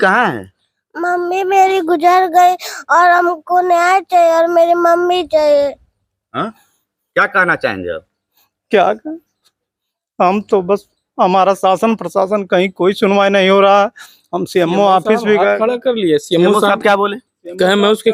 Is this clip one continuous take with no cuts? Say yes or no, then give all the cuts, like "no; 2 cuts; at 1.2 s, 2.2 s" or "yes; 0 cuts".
yes; 0 cuts